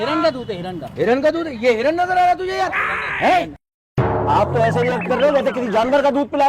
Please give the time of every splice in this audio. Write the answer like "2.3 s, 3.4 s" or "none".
4.0 s